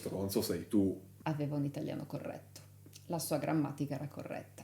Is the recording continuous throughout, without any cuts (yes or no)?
no